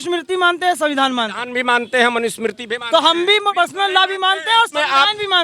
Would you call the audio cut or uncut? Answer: cut